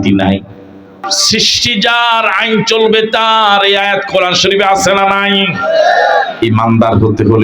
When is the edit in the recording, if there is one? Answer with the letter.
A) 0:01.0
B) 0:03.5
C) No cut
A